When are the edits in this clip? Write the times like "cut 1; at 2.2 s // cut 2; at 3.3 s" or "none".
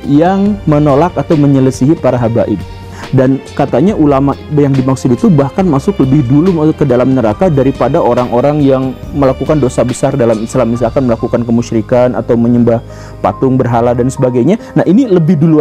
cut 1; at 3.0 s